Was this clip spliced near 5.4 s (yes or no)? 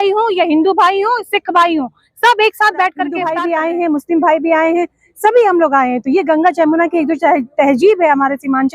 no